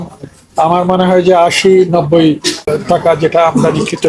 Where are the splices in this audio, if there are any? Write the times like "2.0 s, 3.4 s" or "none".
2.7 s